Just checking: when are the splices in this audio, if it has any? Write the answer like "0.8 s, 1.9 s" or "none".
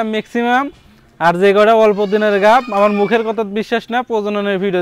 none